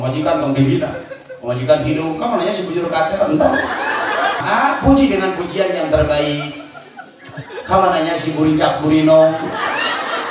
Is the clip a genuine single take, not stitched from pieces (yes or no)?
no